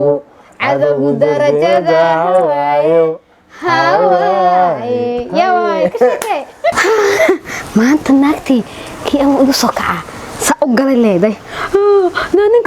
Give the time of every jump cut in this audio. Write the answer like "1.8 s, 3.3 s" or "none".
6.8 s